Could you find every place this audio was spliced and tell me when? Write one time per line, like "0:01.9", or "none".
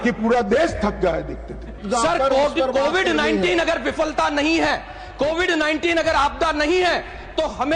0:01.8